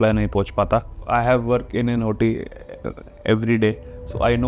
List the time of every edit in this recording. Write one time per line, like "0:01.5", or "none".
0:00.9